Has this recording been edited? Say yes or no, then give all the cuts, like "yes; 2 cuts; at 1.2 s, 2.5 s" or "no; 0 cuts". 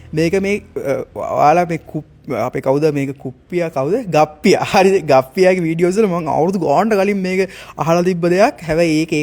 no; 0 cuts